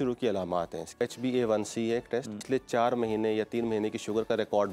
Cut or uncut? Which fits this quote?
cut